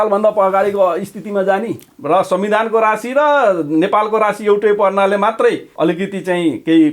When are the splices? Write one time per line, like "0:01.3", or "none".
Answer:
0:01.9
0:05.7